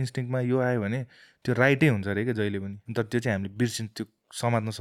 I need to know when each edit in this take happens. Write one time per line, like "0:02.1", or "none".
0:02.8